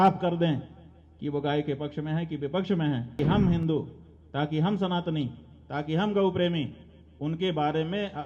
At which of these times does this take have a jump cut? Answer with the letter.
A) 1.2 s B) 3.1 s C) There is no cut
B